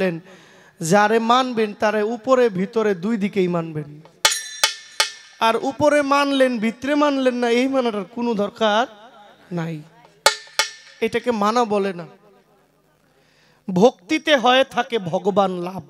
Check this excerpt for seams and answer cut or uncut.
uncut